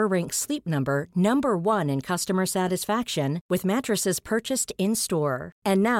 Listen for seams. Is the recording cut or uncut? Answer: uncut